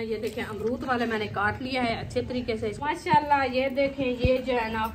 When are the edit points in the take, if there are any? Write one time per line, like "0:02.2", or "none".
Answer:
0:02.8